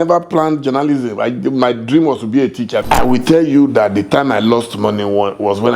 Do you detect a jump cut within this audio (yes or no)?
yes